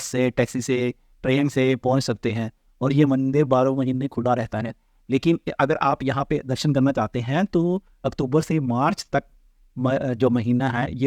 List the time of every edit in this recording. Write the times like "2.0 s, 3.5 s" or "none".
none